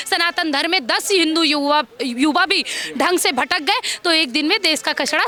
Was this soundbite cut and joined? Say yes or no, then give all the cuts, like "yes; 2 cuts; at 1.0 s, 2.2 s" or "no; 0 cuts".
no; 0 cuts